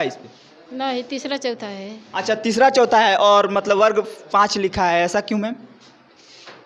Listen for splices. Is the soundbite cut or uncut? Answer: uncut